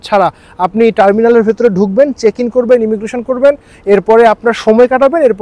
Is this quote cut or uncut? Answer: uncut